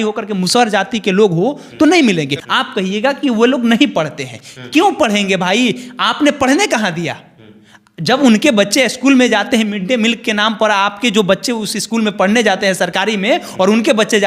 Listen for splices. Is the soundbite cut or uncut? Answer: cut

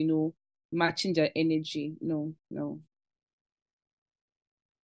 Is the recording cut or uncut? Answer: uncut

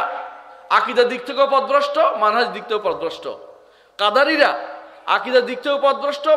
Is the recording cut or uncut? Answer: uncut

